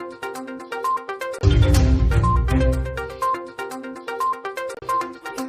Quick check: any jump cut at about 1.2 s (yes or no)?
no